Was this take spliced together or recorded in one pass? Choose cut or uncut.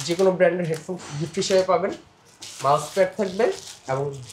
uncut